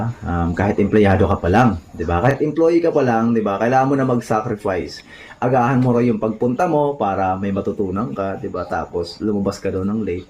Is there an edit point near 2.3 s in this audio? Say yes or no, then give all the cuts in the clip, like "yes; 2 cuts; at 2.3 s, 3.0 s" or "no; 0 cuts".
yes; 1 cut; at 2.3 s